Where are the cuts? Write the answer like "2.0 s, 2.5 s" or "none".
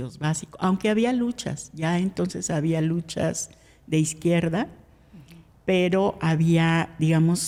none